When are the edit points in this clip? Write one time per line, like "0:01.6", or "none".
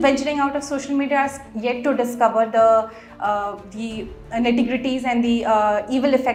none